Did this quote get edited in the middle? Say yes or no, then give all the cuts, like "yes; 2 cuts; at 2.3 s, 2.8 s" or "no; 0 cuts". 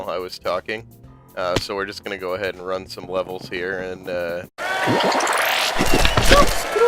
no; 0 cuts